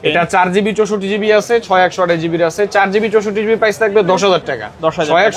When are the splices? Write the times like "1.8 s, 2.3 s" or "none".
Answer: none